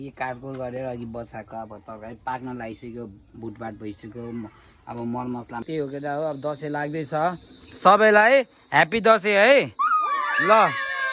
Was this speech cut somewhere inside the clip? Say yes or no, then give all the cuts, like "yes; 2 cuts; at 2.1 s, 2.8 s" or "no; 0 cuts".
yes; 1 cut; at 5.6 s